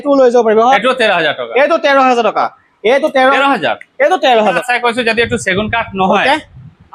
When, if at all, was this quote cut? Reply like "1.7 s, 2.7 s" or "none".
0.8 s, 3.4 s, 4.6 s